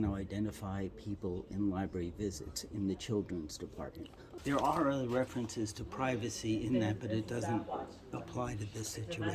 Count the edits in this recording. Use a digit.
1